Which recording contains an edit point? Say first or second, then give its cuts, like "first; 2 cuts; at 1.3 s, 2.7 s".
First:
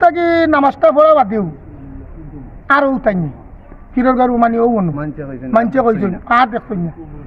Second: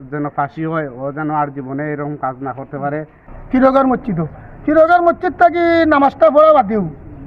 second; 1 cut; at 3.3 s